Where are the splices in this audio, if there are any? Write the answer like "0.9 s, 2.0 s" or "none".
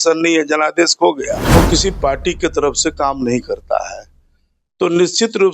1.5 s